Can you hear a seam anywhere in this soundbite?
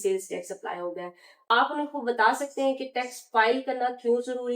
yes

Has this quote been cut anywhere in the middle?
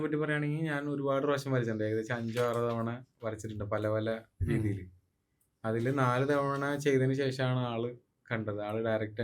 no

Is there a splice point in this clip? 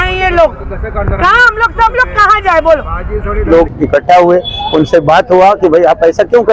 yes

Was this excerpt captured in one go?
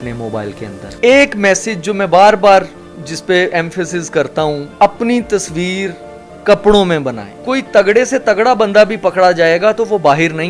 no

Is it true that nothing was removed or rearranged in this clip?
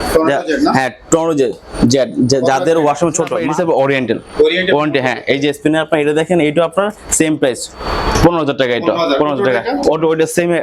no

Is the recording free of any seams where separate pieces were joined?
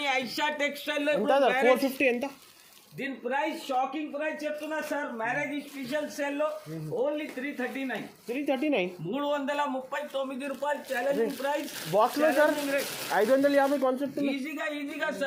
yes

